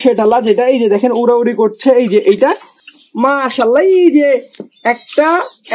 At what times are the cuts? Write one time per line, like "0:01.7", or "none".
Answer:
0:02.7